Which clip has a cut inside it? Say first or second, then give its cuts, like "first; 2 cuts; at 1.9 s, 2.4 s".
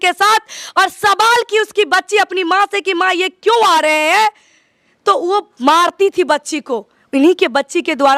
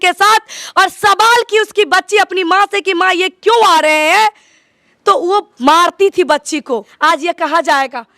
second; 1 cut; at 6.9 s